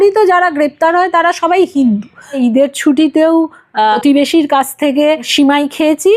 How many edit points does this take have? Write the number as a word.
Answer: three